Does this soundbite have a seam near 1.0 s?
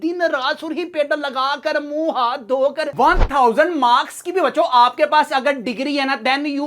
no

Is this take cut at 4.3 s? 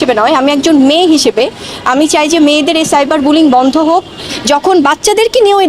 yes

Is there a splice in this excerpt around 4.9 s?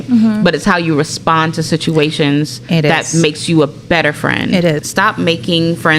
yes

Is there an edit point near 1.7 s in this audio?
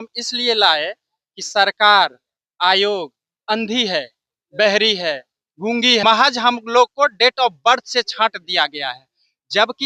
no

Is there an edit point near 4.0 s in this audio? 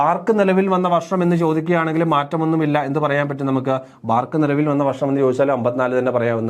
no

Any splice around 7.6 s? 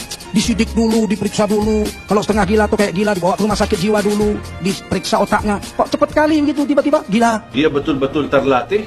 yes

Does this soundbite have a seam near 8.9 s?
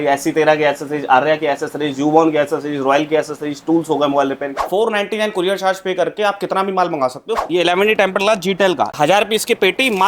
yes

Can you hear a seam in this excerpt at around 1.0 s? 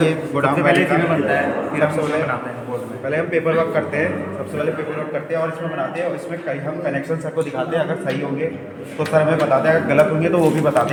no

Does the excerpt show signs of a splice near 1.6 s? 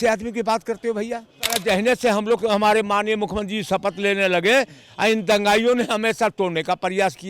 yes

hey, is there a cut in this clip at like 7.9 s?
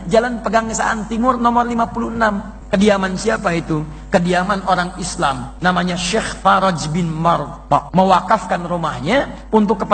yes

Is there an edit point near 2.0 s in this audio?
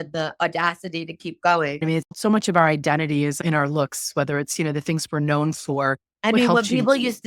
yes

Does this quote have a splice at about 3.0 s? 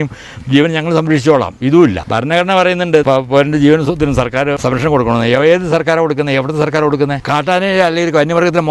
yes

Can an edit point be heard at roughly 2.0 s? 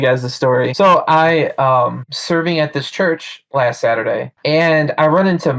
no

